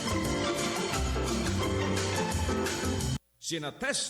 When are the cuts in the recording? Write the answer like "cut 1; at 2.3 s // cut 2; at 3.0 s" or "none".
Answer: cut 1; at 3.2 s